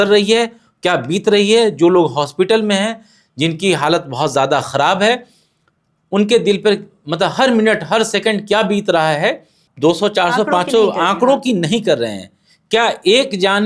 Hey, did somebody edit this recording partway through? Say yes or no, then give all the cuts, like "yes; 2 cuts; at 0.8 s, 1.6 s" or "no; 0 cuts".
yes; 1 cut; at 9.6 s